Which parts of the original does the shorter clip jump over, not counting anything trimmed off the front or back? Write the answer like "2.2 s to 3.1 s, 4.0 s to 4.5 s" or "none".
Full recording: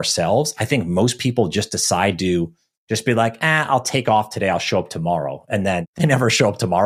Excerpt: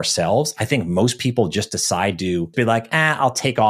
2.5 s to 3.0 s